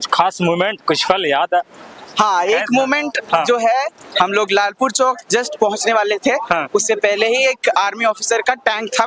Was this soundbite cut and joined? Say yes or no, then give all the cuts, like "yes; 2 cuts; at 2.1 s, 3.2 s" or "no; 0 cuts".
no; 0 cuts